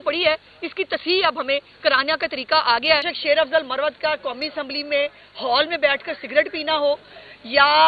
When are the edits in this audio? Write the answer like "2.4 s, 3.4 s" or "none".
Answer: 3.1 s